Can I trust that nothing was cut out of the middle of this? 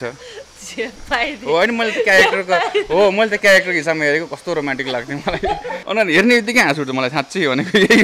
no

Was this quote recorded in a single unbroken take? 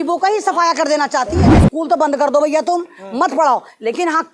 no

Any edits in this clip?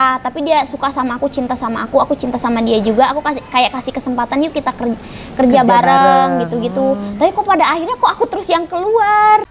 no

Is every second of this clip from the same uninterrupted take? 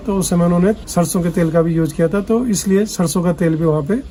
yes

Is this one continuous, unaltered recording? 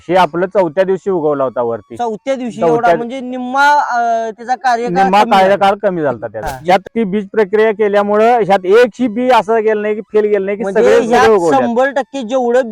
no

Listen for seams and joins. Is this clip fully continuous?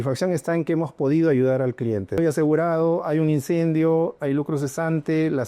no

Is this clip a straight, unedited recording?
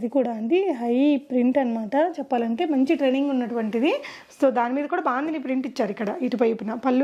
yes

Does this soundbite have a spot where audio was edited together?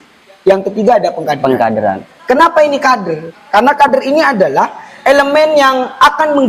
no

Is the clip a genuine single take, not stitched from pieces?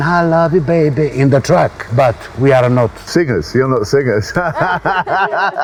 yes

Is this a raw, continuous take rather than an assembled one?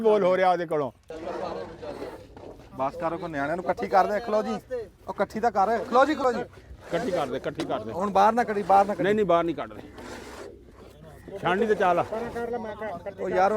no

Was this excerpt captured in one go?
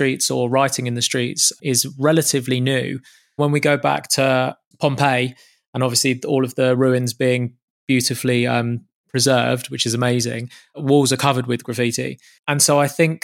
no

